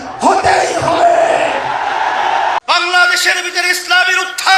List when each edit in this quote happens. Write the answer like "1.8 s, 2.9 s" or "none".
2.6 s